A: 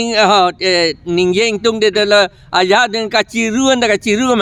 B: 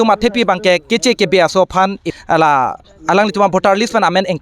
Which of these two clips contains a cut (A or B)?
B